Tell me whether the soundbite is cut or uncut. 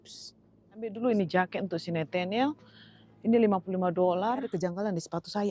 cut